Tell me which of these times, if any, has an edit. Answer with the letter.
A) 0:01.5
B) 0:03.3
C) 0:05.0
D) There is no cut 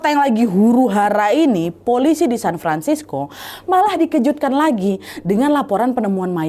D